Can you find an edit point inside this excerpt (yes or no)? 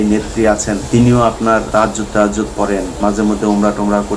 yes